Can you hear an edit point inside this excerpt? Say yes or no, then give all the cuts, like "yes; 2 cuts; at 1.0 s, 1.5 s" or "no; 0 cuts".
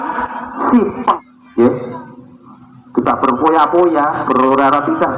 yes; 1 cut; at 1.2 s